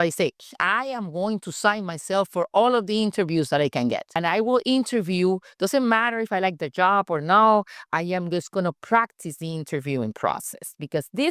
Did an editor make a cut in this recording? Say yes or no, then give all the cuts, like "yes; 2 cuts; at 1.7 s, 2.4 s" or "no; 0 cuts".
yes; 1 cut; at 4.1 s